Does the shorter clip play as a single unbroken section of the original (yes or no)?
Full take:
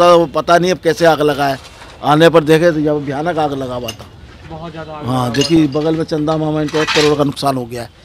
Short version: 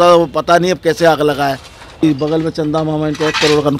no